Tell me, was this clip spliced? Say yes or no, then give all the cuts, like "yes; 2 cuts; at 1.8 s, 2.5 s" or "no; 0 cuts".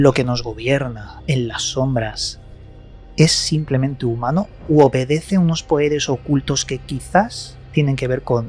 no; 0 cuts